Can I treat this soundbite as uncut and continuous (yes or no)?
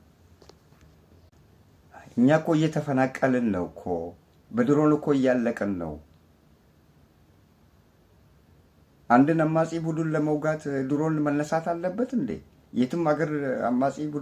yes